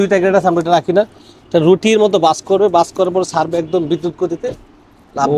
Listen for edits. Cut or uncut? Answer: uncut